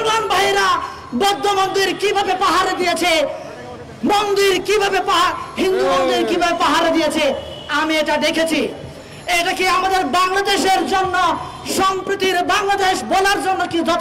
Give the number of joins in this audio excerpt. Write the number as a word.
zero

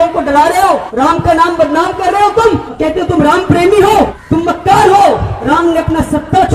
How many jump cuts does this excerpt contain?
four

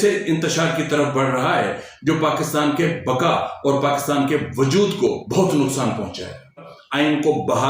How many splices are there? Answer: two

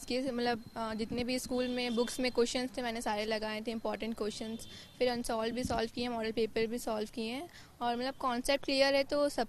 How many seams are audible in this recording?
zero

